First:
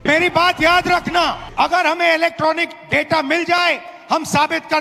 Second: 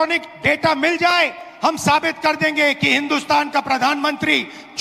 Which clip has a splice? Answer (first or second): first